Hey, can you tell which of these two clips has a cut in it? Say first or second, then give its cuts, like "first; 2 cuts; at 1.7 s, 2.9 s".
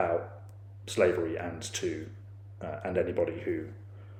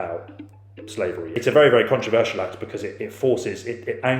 second; 1 cut; at 1.3 s